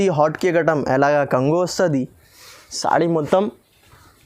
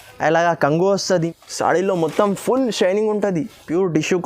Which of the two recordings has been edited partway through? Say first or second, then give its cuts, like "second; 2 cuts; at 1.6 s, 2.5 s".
second; 1 cut; at 1.0 s